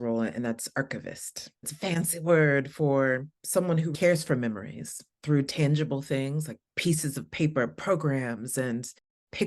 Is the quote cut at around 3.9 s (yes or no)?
yes